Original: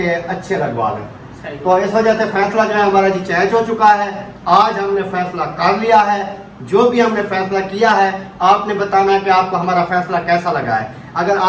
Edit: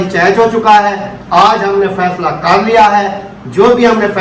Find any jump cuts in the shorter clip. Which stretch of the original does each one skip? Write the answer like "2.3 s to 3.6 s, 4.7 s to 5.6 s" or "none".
none